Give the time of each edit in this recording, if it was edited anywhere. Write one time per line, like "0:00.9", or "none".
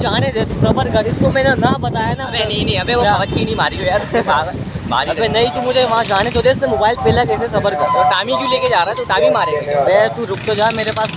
none